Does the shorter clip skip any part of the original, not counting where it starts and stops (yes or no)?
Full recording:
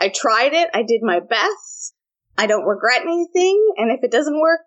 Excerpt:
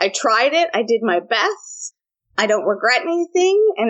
no